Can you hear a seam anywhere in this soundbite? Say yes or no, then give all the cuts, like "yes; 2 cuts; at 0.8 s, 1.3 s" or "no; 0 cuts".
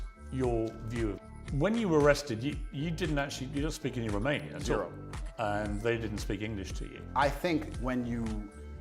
no; 0 cuts